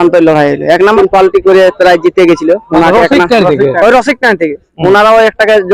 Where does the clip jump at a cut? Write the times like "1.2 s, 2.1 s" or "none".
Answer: 0.9 s